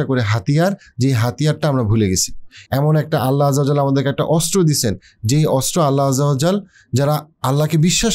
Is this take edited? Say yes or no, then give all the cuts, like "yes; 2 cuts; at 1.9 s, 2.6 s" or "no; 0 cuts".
no; 0 cuts